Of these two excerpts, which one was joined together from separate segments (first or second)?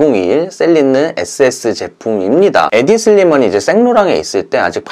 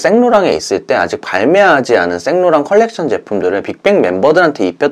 first